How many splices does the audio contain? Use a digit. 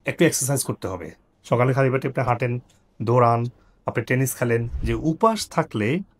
2